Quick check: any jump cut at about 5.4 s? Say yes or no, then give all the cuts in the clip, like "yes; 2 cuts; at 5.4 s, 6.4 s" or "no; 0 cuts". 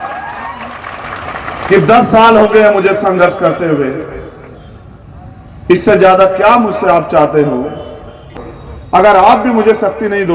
no; 1 cut; at 8.3 s